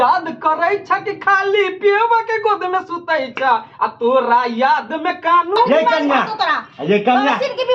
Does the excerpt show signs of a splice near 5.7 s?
yes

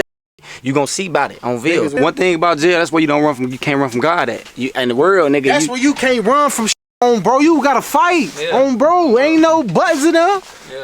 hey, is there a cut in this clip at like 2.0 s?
yes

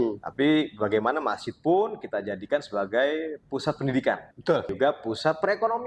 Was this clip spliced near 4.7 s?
yes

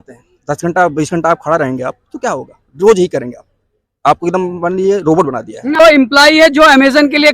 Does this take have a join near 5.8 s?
yes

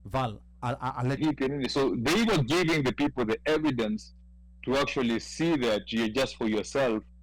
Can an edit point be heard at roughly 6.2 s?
no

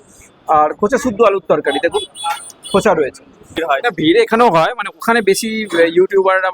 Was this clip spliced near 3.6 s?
yes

